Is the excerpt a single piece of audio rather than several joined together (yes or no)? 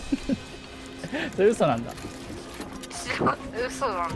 yes